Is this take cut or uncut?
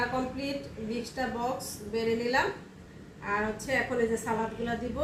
uncut